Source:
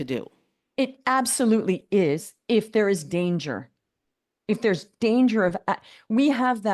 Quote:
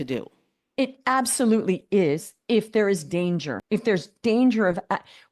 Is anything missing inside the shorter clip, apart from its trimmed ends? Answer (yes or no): yes